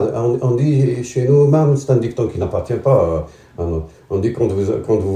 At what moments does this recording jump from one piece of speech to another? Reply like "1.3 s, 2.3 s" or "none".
none